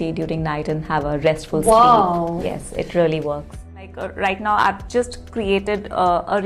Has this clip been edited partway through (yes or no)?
yes